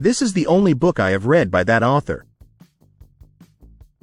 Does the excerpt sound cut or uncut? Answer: uncut